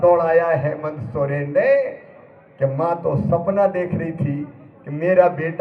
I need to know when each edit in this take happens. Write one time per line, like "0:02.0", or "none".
none